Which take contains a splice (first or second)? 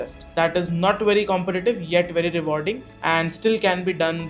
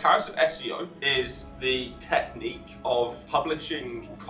second